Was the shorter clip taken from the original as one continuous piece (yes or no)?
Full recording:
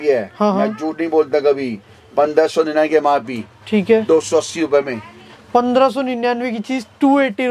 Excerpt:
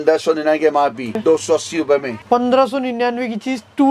no